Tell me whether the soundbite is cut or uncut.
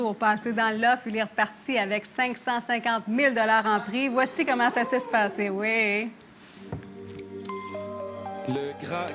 uncut